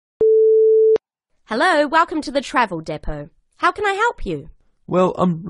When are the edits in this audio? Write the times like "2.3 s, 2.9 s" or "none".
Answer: 1.0 s